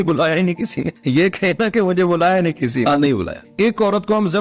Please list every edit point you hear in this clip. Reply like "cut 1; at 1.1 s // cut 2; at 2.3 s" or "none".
cut 1; at 0.9 s // cut 2; at 3.4 s